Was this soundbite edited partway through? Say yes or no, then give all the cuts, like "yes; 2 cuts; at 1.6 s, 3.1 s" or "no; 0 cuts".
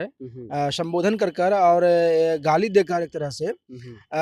no; 0 cuts